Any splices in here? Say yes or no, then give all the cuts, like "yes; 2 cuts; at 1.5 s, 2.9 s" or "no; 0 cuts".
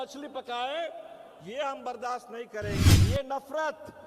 yes; 1 cut; at 3.0 s